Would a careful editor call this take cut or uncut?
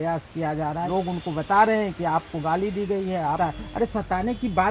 cut